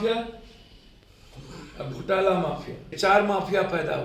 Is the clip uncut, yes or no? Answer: no